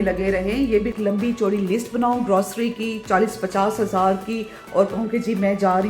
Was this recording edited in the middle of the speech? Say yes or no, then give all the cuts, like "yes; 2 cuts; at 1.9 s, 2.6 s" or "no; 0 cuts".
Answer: yes; 1 cut; at 0.9 s